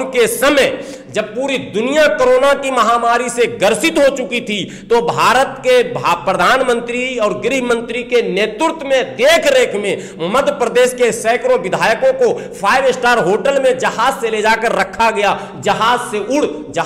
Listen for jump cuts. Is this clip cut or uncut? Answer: uncut